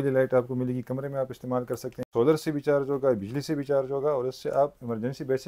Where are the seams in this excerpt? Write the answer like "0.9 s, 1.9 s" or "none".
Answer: 2.0 s